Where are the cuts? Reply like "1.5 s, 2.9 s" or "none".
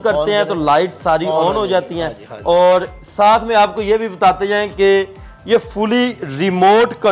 none

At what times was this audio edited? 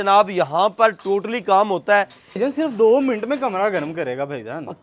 2.4 s

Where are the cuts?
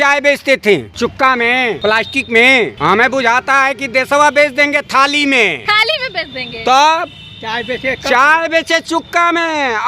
0.9 s, 1.8 s, 2.7 s, 5.6 s

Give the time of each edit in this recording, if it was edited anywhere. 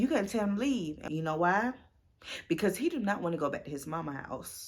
1.0 s

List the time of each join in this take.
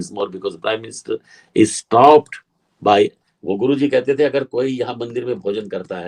3.3 s

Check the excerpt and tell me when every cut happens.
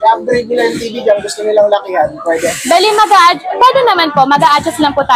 none

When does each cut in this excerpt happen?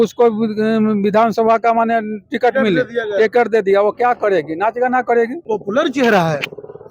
5.4 s

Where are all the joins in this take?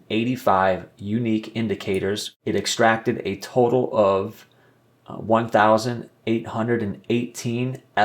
2.3 s

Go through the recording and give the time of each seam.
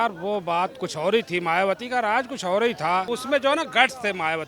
3.1 s

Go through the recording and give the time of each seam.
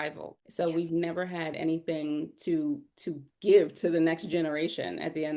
none

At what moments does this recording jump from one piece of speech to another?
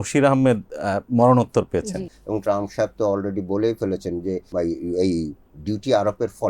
2.2 s, 4.5 s

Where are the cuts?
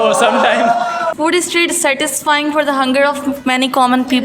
1.1 s

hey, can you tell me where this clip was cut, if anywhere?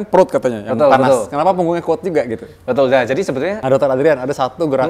3.6 s

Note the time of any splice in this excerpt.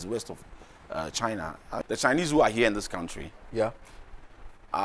1.8 s

